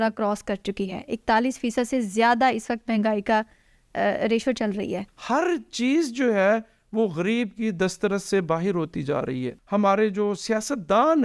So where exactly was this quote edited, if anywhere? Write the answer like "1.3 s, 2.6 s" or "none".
5.1 s, 9.5 s